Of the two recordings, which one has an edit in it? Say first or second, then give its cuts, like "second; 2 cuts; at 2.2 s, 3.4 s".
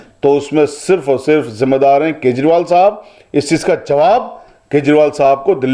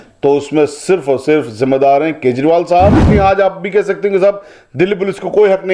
second; 1 cut; at 3.0 s